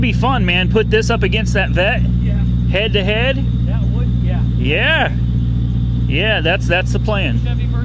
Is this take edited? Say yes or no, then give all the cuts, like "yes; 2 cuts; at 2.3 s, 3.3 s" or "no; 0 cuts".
no; 0 cuts